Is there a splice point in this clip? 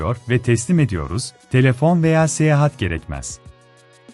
no; 0 cuts

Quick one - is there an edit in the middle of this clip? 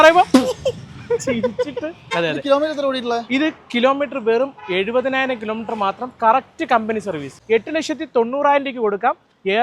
yes; 2 cuts; at 2.1 s, 7.3 s

